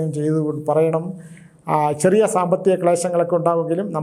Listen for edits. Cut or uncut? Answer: uncut